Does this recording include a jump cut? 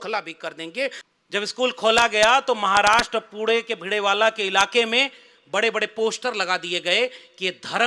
yes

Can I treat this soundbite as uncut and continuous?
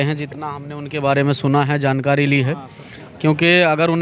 yes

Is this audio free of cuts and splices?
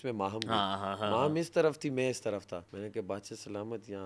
no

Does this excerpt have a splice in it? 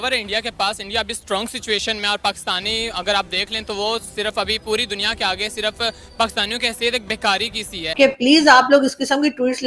yes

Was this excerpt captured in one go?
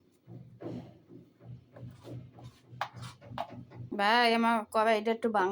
no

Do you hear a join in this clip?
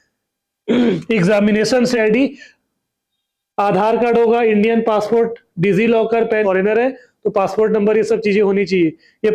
yes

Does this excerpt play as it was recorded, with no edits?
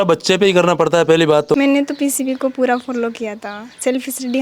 no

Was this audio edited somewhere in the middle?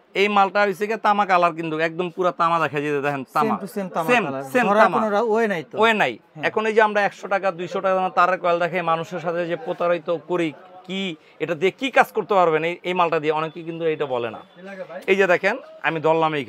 no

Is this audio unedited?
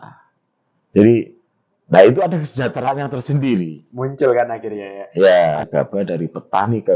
no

